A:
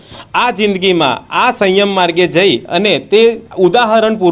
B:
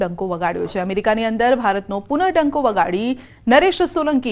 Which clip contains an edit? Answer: B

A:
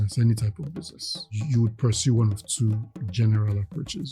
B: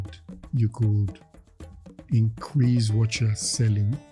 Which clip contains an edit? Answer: A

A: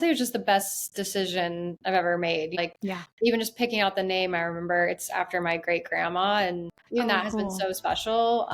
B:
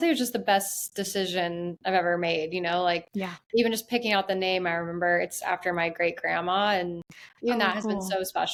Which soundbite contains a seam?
A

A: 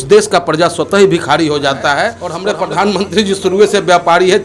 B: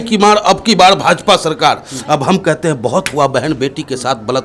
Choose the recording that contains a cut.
A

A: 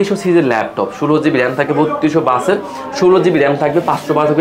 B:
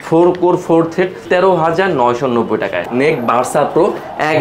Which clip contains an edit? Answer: B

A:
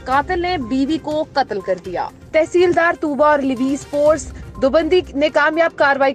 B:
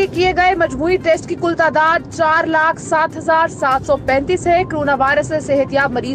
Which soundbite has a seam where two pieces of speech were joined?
A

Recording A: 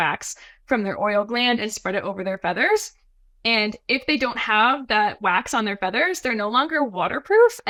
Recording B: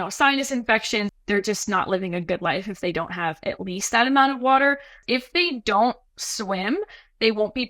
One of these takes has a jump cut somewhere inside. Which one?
B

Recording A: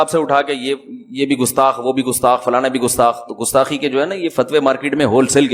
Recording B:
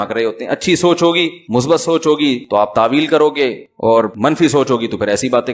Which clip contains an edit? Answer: B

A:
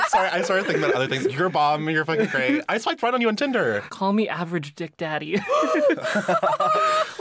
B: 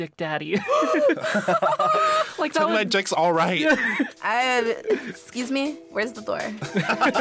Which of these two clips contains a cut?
A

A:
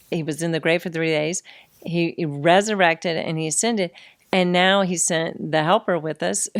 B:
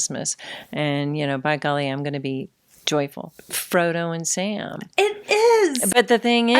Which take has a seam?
B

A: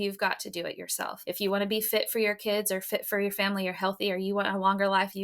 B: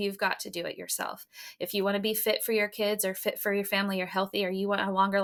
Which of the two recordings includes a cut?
A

